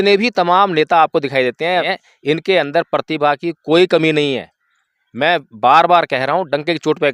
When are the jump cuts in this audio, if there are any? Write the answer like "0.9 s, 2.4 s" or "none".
1.9 s

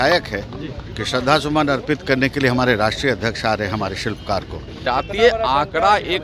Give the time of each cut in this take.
4.8 s

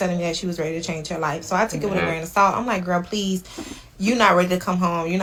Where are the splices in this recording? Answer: none

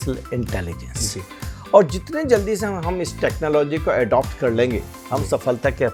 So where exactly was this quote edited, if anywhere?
none

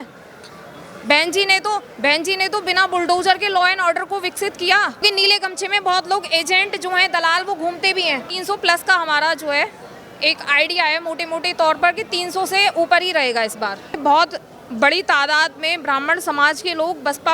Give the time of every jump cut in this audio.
5.0 s, 8.3 s, 14.0 s

